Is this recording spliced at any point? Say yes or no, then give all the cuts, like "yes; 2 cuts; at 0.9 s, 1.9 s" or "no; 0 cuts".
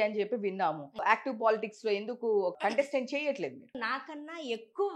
yes; 3 cuts; at 1.0 s, 2.5 s, 3.8 s